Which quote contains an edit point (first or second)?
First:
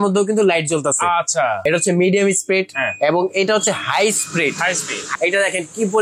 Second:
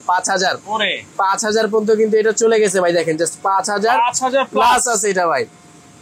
first